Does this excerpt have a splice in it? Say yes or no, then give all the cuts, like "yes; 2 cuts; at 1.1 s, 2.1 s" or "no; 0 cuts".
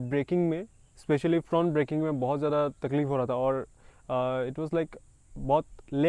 no; 0 cuts